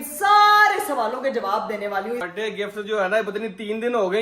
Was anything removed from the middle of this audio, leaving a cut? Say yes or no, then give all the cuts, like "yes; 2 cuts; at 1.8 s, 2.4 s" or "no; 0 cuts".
yes; 1 cut; at 2.2 s